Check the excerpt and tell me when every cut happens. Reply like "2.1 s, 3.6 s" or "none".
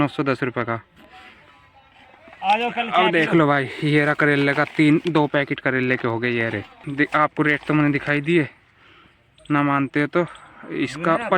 6.8 s